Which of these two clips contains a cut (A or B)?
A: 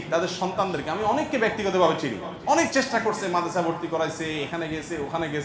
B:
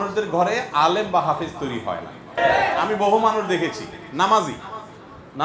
B